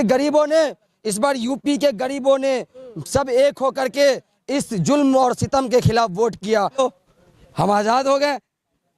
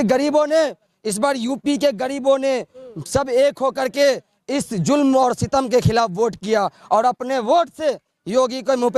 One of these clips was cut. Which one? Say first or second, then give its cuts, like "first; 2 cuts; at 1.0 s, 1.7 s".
first; 1 cut; at 6.8 s